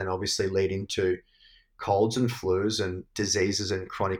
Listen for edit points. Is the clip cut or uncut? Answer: cut